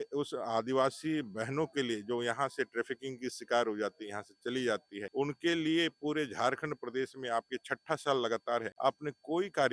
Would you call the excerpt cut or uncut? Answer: cut